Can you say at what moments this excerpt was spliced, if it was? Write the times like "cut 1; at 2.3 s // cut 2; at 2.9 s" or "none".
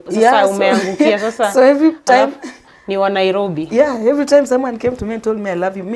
none